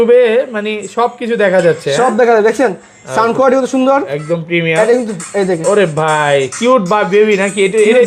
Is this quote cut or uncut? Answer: uncut